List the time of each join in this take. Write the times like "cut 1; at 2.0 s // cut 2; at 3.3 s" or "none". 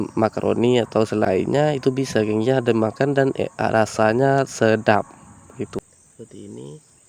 cut 1; at 1.3 s // cut 2; at 5.8 s